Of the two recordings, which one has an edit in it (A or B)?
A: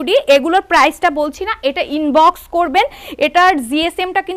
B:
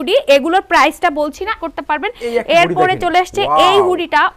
B